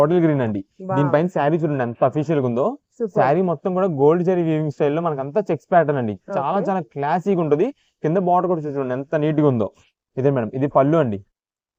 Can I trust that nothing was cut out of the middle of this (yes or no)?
yes